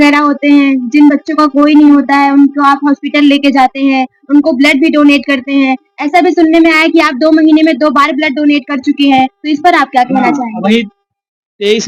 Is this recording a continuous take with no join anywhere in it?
yes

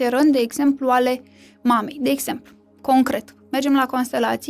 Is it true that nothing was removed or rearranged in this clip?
yes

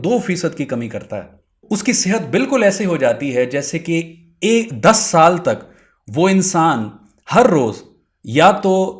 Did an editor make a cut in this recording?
yes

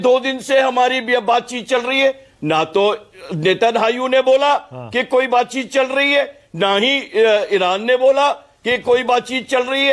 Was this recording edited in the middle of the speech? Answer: no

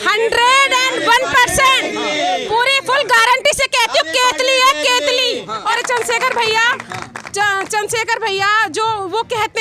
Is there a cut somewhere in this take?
yes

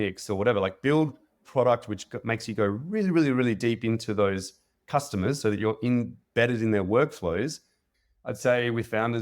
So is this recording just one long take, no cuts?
no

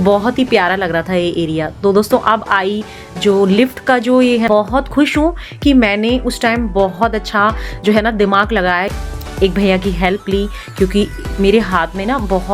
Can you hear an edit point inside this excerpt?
yes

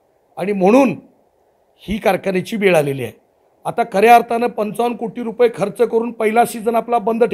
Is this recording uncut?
yes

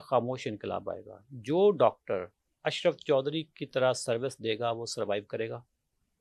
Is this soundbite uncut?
yes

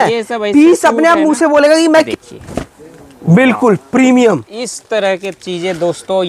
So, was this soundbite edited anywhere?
yes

